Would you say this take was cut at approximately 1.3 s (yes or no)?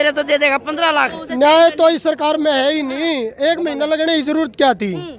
yes